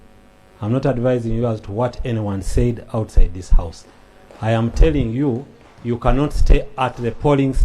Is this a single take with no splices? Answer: yes; 0 cuts

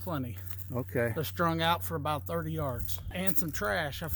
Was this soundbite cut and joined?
yes; 1 cut; at 3.0 s

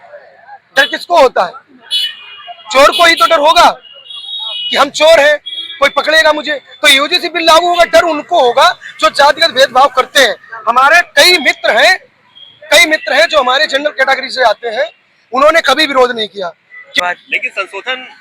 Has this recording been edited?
yes; 1 cut; at 16.9 s

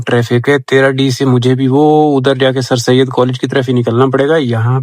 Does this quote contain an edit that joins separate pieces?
no; 0 cuts

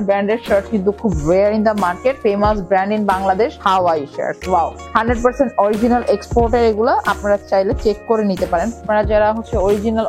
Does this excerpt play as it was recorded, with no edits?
no; 4 cuts; at 2.2 s, 3.5 s, 4.8 s, 8.8 s

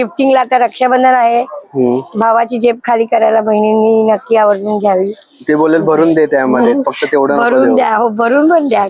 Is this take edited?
no; 0 cuts

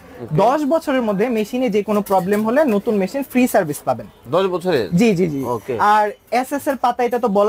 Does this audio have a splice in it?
no; 0 cuts

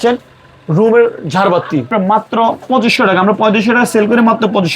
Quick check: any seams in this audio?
yes; 1 cut; at 1.9 s

